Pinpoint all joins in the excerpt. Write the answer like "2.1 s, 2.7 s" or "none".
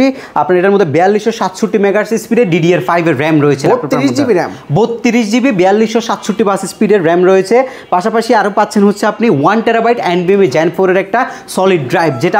none

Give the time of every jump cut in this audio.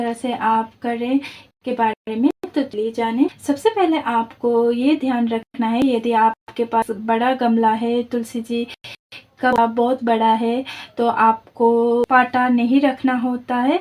12.1 s

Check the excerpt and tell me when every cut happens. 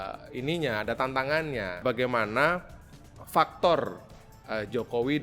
1.8 s

